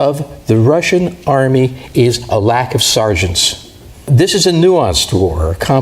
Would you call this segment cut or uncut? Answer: cut